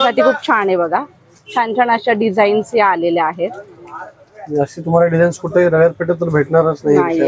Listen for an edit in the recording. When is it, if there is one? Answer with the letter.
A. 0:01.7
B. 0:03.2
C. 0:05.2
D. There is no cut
D